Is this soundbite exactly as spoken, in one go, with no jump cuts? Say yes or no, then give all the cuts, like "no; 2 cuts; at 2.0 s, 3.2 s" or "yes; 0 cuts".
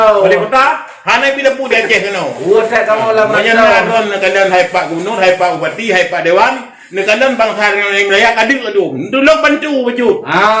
yes; 0 cuts